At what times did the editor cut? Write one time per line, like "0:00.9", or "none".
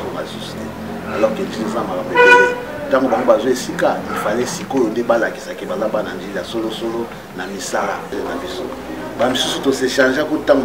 0:08.1